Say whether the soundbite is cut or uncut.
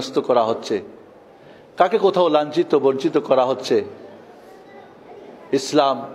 uncut